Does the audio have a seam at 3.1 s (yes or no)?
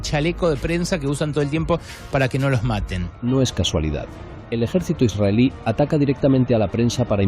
yes